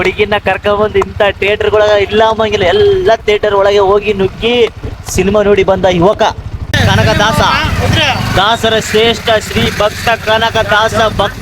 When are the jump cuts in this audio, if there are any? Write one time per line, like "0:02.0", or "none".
0:06.8